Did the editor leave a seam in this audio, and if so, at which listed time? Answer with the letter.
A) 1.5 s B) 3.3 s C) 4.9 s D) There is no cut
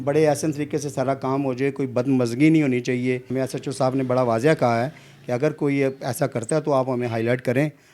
B